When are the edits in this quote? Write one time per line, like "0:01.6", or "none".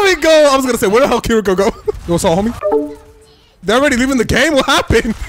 0:02.0